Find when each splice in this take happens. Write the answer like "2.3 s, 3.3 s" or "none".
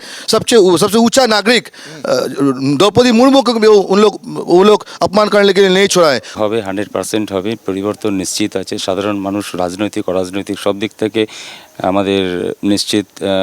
6.3 s